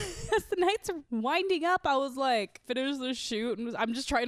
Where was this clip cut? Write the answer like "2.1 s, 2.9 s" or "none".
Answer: 1.0 s, 2.6 s